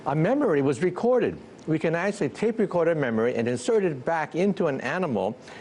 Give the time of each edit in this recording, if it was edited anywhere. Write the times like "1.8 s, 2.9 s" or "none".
2.6 s